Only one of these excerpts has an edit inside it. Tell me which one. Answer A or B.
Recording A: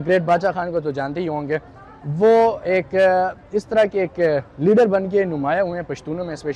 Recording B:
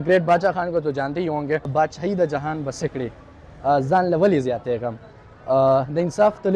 B